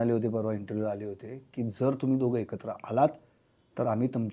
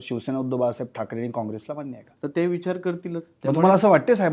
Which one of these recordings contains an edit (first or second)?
second